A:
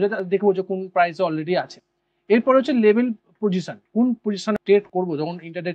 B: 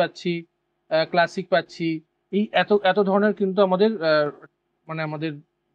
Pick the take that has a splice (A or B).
A